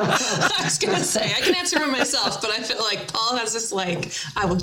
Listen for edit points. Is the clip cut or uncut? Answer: uncut